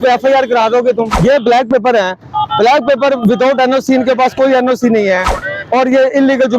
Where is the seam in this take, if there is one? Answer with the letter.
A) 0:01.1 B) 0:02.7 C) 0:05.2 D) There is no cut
A